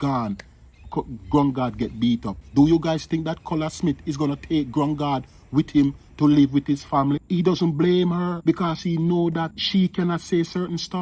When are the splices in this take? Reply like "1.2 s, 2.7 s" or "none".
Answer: 2.4 s, 7.2 s, 8.4 s, 9.6 s